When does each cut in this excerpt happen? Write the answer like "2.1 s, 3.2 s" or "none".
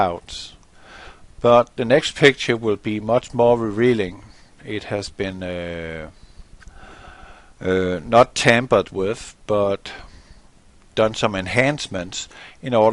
none